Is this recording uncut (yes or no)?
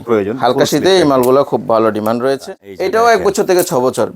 no